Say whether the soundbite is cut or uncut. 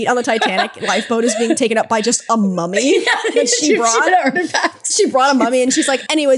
uncut